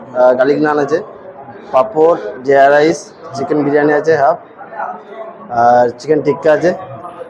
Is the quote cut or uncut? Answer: uncut